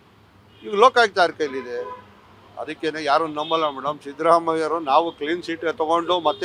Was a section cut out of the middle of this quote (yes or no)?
no